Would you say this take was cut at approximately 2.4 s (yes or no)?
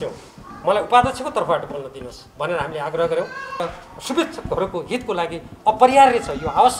no